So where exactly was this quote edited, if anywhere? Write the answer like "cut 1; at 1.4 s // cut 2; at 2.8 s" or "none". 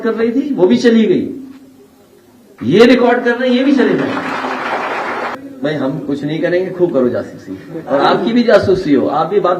none